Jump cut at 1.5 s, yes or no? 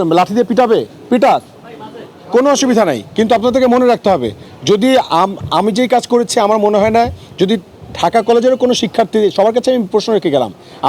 no